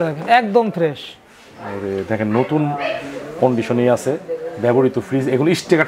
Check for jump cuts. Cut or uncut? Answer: uncut